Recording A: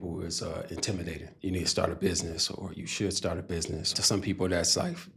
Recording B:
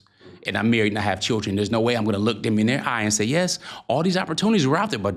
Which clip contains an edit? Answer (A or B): A